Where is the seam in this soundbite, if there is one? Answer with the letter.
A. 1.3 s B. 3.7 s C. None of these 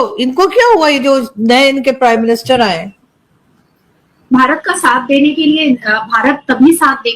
C